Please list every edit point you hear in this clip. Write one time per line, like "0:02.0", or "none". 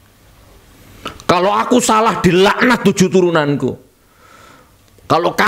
none